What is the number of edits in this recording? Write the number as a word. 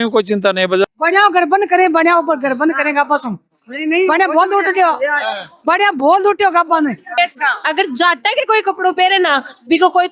two